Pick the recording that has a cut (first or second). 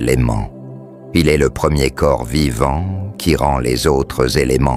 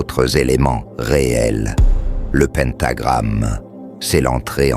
second